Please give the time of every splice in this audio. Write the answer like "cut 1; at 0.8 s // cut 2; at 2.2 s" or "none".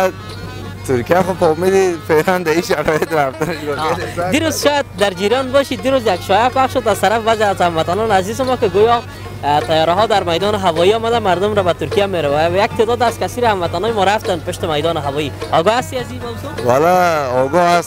none

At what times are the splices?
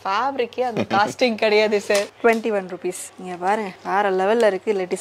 cut 1; at 2.1 s

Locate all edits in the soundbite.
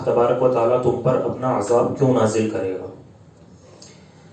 none

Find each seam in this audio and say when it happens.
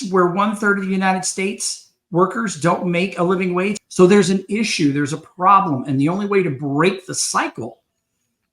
cut 1; at 3.8 s

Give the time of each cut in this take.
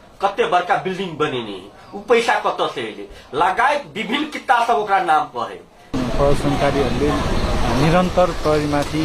cut 1; at 5.8 s

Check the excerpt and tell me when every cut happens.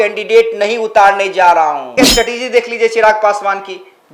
cut 1; at 1.9 s

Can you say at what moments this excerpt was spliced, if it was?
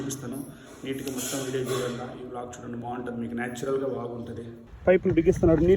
cut 1; at 4.6 s

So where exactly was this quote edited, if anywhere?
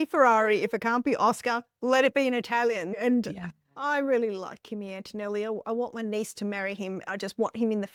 none

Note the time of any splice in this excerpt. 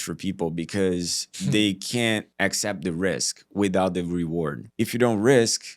cut 1; at 2.3 s // cut 2; at 4.6 s

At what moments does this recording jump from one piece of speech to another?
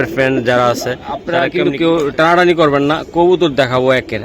cut 1; at 1.4 s

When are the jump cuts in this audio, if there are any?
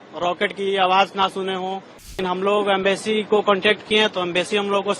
cut 1; at 2.2 s

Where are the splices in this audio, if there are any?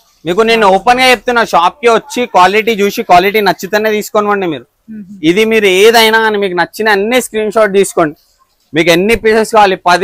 none

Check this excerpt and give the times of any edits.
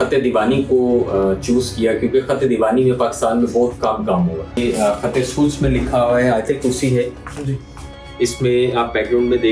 cut 1; at 4.6 s

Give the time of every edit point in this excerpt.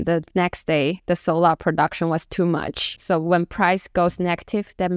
cut 1; at 3.0 s

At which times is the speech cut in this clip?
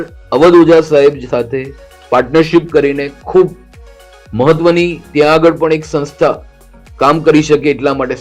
none

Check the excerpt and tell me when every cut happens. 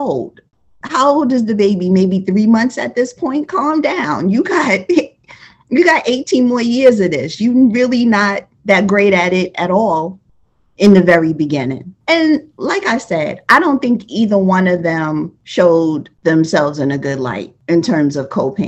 none

